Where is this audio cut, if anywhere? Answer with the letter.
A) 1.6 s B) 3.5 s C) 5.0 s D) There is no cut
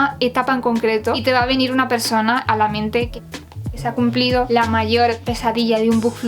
B